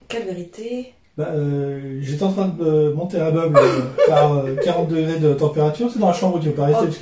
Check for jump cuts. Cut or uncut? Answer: uncut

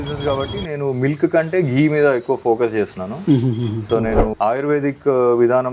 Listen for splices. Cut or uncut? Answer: uncut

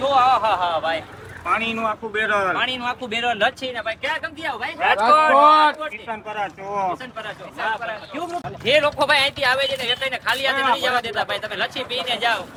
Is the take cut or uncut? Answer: uncut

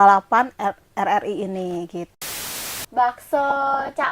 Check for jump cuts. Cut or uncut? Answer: cut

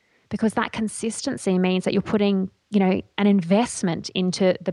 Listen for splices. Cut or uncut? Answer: uncut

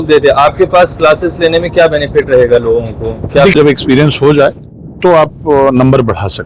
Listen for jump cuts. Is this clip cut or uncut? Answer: cut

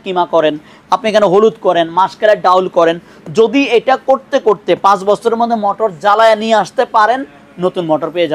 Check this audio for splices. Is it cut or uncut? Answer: uncut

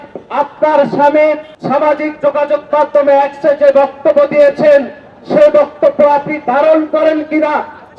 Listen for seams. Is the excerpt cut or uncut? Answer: cut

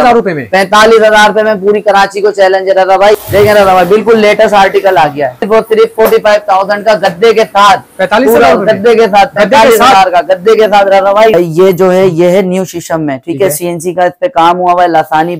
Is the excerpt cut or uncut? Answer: cut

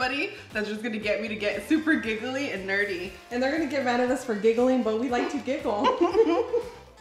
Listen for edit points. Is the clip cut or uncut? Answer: cut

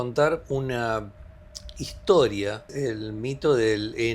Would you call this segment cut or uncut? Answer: cut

